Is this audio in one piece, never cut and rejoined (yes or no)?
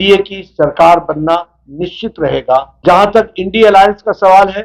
no